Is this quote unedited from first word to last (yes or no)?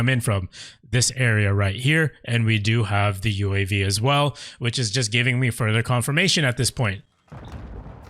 yes